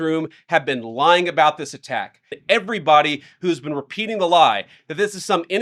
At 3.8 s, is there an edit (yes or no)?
no